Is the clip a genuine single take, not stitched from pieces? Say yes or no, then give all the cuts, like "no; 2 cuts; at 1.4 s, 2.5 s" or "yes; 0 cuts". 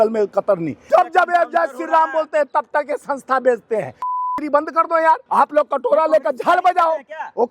no; 3 cuts; at 0.8 s, 4.1 s, 5.2 s